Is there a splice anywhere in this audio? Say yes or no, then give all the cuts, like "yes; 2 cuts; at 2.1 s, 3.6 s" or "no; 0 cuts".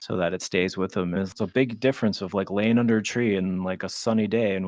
yes; 1 cut; at 1.2 s